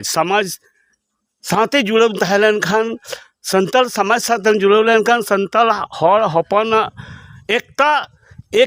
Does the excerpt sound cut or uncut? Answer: uncut